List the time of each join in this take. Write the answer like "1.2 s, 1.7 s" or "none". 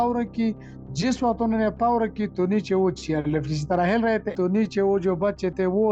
4.3 s